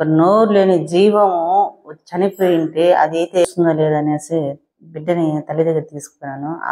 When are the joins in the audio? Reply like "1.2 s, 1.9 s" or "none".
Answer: 3.4 s